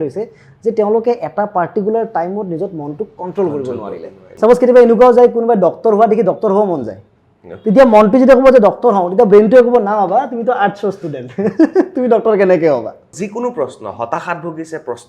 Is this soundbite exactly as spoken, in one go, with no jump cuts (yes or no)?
no